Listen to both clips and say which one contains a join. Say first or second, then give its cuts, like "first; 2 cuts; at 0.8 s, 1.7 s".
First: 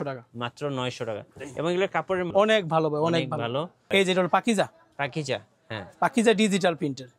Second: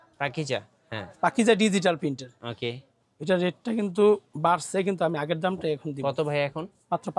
first; 2 cuts; at 2.3 s, 3.8 s